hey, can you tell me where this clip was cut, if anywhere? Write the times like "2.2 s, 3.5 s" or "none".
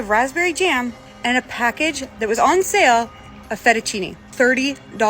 1.1 s, 4.2 s